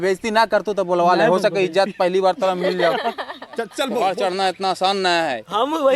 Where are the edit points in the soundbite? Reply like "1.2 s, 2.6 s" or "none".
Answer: 3.8 s

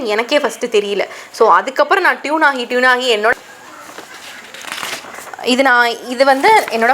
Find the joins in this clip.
3.4 s

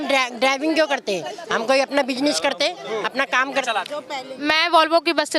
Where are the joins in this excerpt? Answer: 3.7 s

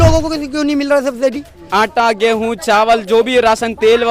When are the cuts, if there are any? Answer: 1.5 s

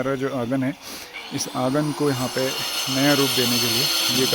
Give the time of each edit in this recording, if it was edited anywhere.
none

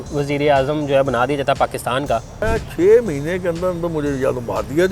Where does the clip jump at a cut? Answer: 2.4 s

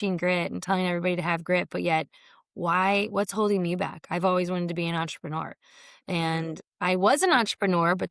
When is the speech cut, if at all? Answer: none

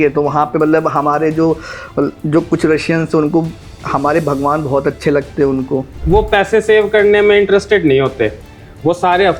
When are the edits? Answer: 6.0 s

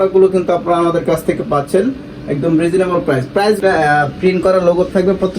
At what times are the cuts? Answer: 3.6 s

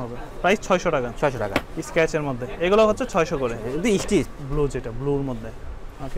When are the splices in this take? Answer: 1.8 s, 4.3 s

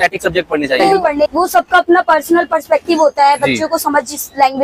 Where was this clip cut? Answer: 1.3 s

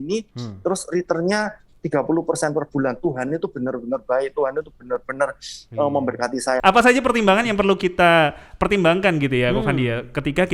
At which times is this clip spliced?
6.6 s

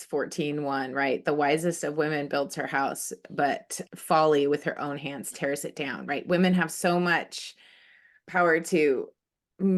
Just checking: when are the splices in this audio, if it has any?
none

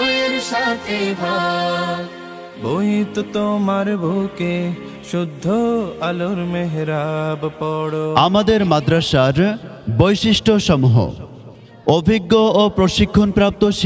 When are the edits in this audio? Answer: 8.1 s

